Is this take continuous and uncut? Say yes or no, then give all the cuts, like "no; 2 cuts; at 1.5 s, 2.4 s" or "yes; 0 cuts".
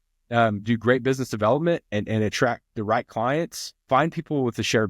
no; 1 cut; at 3.8 s